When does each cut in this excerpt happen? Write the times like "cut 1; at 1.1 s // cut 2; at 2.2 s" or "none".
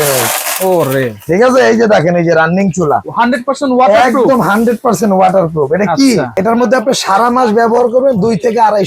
cut 1; at 3.1 s // cut 2; at 6.4 s